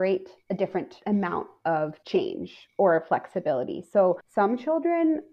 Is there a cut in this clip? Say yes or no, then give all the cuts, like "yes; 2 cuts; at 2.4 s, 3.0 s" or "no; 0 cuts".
yes; 3 cuts; at 0.9 s, 2.0 s, 4.2 s